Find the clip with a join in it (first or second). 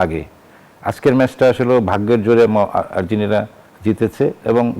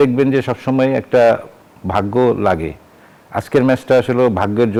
first